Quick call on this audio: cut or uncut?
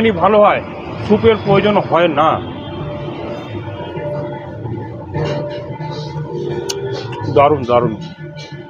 uncut